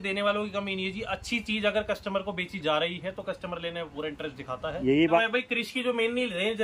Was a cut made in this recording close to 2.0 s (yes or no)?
no